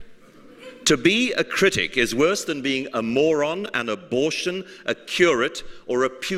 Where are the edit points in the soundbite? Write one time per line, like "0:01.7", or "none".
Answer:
0:00.9